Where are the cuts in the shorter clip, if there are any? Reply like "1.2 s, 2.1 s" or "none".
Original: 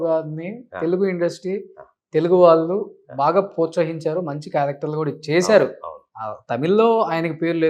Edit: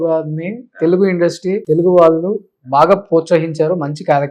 1.6 s